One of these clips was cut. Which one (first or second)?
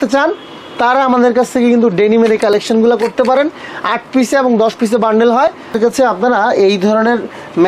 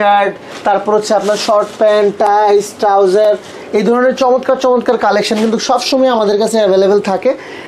first